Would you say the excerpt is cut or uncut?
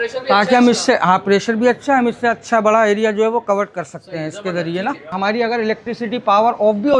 uncut